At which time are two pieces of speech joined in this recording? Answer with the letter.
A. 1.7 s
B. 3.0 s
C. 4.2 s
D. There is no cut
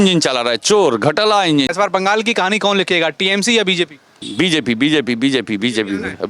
A